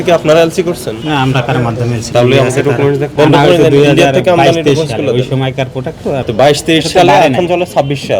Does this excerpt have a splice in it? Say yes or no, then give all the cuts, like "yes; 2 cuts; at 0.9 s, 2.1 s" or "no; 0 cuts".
yes; 3 cuts; at 2.0 s, 3.1 s, 6.3 s